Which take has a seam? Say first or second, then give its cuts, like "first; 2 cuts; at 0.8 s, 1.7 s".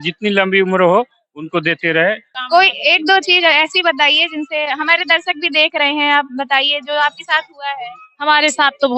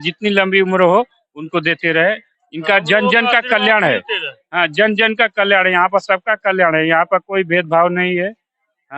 first; 1 cut; at 2.4 s